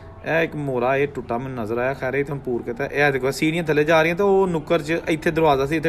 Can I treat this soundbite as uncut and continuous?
yes; 0 cuts

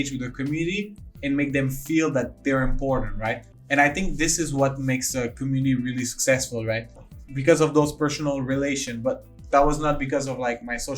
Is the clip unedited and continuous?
no; 2 cuts; at 3.4 s, 7.0 s

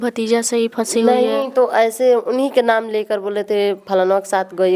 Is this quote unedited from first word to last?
yes; 0 cuts

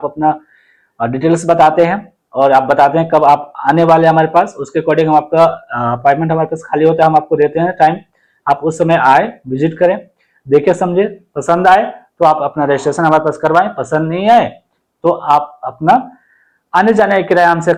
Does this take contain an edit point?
no; 0 cuts

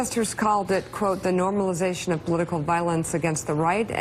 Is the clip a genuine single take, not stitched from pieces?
yes; 0 cuts

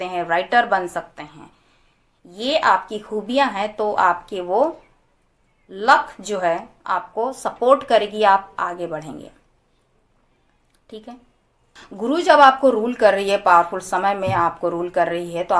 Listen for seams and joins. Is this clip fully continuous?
yes; 0 cuts

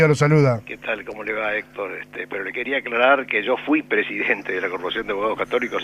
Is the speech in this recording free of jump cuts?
yes; 0 cuts

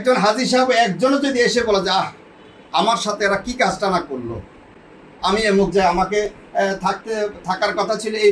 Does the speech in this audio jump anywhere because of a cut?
no; 0 cuts

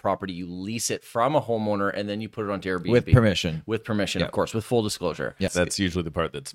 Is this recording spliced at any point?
yes; 1 cut; at 5.5 s

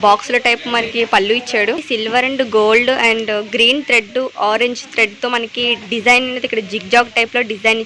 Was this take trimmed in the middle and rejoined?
yes; 1 cut; at 1.8 s

